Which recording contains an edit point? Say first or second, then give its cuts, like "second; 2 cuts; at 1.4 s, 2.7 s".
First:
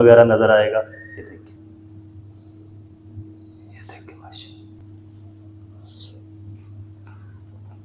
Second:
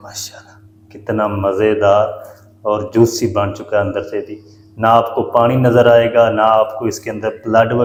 first; 2 cuts; at 1.6 s, 4.8 s